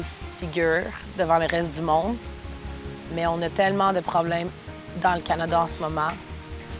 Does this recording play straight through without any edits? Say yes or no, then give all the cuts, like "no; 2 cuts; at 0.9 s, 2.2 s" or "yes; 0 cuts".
yes; 0 cuts